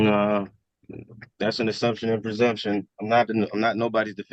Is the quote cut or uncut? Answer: uncut